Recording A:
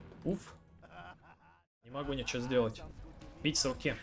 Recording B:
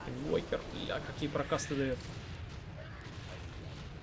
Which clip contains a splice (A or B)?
A